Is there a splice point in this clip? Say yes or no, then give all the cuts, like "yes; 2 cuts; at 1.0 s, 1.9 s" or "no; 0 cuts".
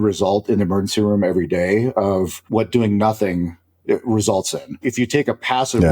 yes; 2 cuts; at 2.4 s, 4.8 s